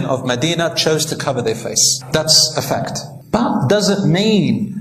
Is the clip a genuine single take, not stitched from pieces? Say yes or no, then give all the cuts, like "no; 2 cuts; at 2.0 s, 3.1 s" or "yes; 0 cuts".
yes; 0 cuts